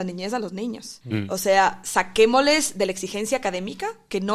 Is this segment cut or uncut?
cut